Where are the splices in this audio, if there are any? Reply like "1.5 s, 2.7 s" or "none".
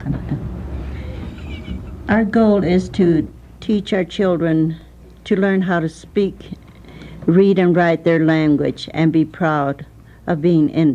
4.1 s

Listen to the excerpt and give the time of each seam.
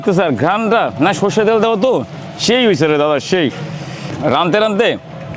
none

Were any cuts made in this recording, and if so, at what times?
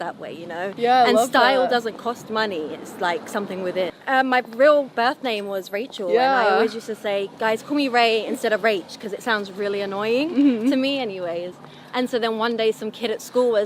4.0 s

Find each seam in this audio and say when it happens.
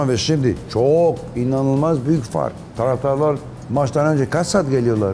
none

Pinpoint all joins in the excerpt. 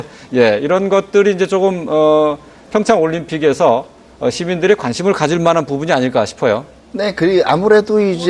none

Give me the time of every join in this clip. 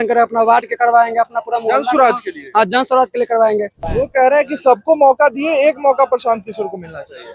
3.8 s

